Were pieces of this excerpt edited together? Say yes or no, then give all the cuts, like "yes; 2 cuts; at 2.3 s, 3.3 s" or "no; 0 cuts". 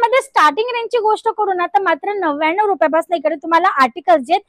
no; 0 cuts